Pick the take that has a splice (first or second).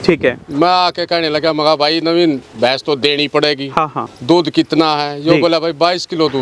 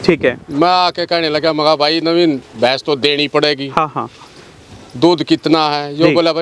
first